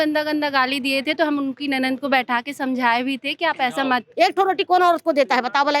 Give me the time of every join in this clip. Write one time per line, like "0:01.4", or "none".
0:04.1